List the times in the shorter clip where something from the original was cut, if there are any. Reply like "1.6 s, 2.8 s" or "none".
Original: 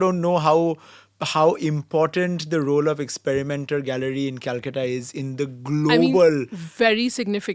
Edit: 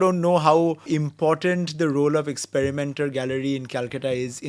0.9 s